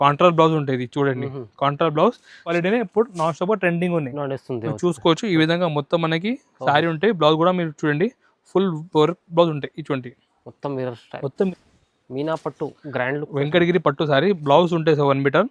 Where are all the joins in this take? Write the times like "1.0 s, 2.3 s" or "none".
2.5 s, 11.5 s